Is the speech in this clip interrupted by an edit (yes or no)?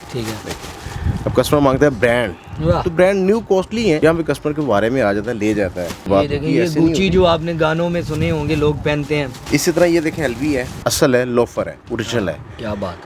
yes